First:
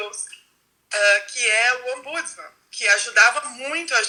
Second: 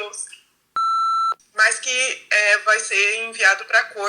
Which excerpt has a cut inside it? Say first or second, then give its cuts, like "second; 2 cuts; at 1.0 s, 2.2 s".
second; 1 cut; at 0.9 s